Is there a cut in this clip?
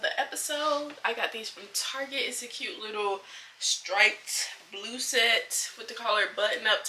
no; 0 cuts

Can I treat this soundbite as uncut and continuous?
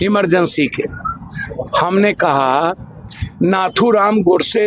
yes; 0 cuts

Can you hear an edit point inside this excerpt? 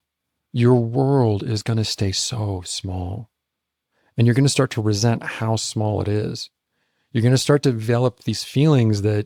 no; 0 cuts

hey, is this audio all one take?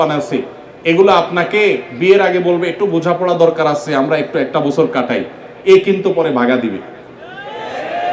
yes; 0 cuts

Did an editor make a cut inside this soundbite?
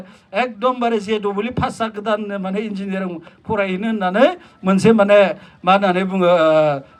no; 0 cuts

